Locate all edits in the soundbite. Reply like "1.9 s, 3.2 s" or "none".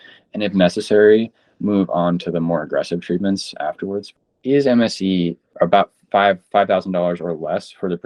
4.1 s, 5.4 s